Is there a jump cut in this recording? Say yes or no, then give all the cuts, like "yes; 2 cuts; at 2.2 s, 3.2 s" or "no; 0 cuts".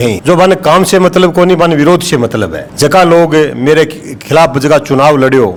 no; 0 cuts